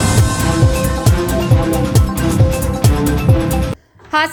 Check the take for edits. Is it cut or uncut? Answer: uncut